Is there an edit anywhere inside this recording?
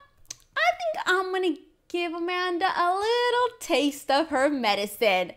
no; 0 cuts

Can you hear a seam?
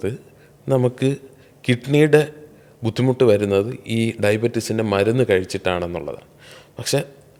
no; 0 cuts

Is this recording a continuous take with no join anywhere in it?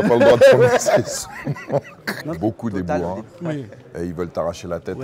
no; 1 cut; at 2.1 s

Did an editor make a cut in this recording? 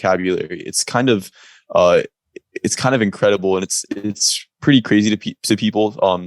no; 0 cuts

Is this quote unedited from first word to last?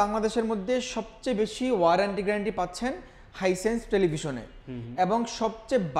yes; 0 cuts

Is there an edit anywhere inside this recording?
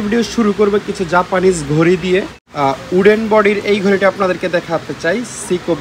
yes; 1 cut; at 2.4 s

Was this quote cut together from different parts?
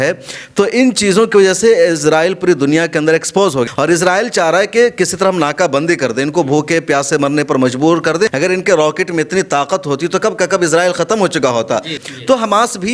yes; 3 cuts; at 3.6 s, 8.3 s, 12.0 s

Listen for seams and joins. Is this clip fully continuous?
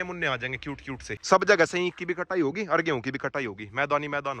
no; 1 cut; at 1.1 s

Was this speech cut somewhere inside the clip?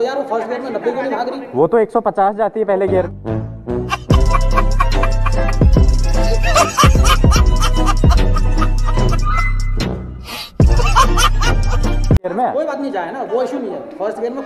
no; 0 cuts

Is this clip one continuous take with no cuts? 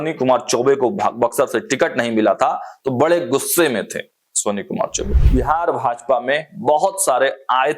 no; 1 cut; at 5.2 s

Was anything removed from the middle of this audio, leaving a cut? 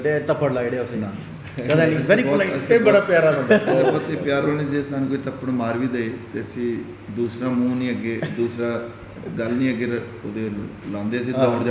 no; 0 cuts

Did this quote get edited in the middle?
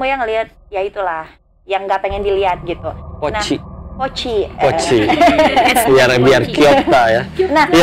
no; 0 cuts

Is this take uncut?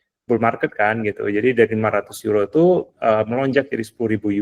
yes; 0 cuts

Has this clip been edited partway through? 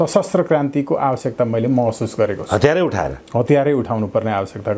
no; 0 cuts

